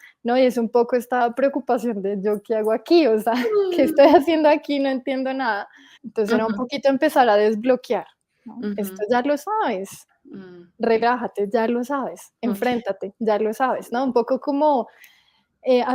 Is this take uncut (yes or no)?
no